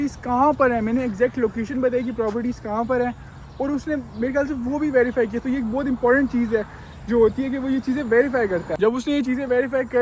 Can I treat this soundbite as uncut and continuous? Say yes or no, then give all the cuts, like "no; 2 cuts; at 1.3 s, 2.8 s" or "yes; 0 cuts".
yes; 0 cuts